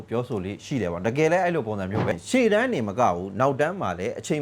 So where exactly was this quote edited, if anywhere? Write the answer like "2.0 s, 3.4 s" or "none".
2.1 s